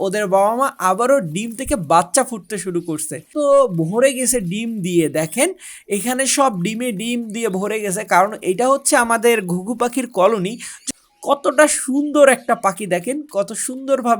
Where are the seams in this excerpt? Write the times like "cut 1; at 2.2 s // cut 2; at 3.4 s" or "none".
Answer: cut 1; at 3.3 s // cut 2; at 10.8 s